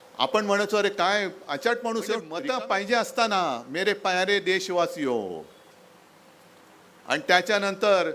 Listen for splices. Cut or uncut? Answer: cut